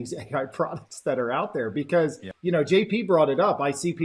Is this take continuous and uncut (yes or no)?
no